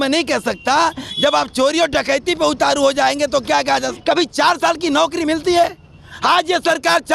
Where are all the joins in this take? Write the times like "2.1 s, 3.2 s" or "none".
3.9 s